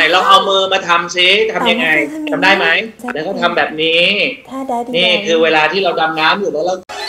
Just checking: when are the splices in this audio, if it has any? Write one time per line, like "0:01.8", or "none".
0:03.0